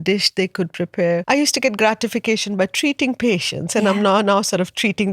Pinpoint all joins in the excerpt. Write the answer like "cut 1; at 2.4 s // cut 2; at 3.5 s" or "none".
cut 1; at 1.2 s